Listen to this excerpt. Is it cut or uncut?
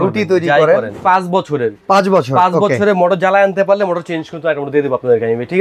cut